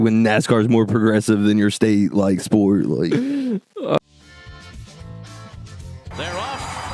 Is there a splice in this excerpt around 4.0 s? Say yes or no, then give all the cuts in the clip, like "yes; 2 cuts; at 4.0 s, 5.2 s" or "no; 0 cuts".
yes; 1 cut; at 4.0 s